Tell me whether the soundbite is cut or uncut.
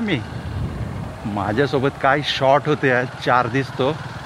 uncut